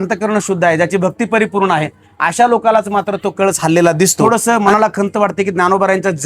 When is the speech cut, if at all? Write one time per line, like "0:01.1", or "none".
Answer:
0:04.2